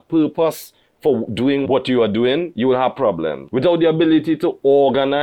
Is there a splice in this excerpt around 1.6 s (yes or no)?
yes